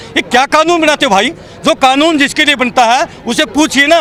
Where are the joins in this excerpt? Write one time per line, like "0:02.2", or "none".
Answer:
none